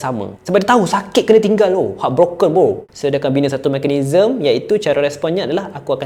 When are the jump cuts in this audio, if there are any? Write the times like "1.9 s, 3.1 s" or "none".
2.9 s